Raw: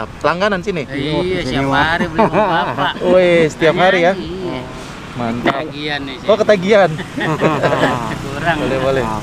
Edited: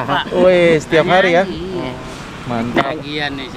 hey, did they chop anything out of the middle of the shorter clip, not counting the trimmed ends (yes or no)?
no